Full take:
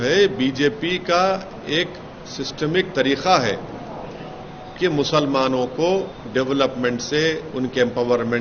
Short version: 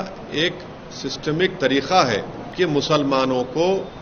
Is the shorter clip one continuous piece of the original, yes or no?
no